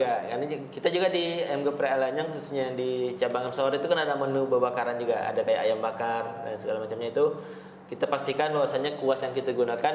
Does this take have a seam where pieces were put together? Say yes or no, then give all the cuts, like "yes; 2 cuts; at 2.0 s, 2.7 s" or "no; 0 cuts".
no; 0 cuts